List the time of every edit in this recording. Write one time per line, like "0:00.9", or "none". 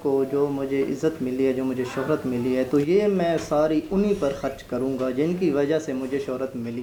none